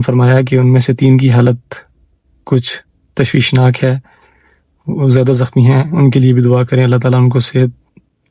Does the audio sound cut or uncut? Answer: uncut